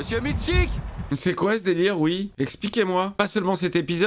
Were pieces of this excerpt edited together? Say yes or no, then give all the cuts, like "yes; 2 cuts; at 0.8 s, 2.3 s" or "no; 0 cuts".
yes; 1 cut; at 2.3 s